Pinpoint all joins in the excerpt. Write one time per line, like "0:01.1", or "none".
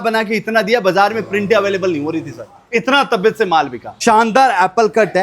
0:03.8